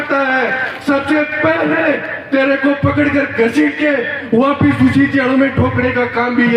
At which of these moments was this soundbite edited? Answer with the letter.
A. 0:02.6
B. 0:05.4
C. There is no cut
C